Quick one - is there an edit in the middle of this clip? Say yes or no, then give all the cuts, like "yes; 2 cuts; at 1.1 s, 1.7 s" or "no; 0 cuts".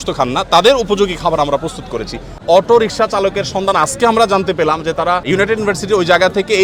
yes; 2 cuts; at 2.4 s, 5.2 s